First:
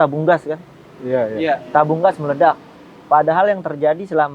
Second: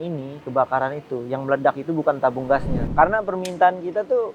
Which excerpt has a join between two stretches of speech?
second; 1 cut; at 2.8 s

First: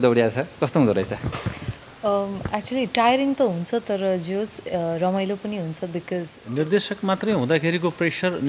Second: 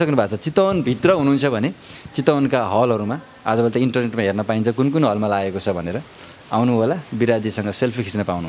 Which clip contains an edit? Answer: first; 1 cut; at 6.4 s

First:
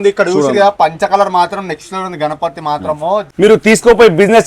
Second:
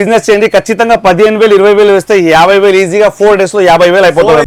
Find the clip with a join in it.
first; 1 cut; at 3.2 s

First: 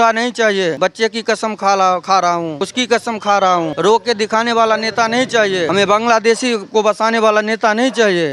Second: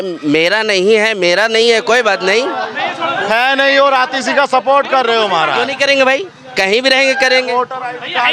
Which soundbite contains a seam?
first; 4 cuts; at 0.8 s, 2.6 s, 3.7 s, 5.7 s

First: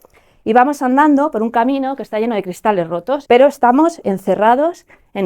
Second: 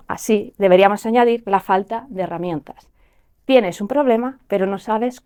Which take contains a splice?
first; 1 cut; at 3.2 s

